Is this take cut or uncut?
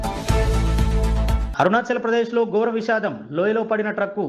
cut